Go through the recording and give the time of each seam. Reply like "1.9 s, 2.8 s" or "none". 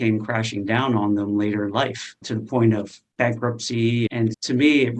4.1 s